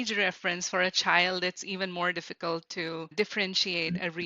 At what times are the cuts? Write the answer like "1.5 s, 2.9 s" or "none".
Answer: 3.1 s